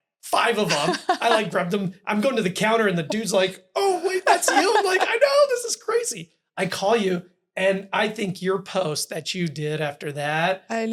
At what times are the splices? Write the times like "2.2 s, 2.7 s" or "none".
none